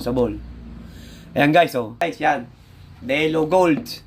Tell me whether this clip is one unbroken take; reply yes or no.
no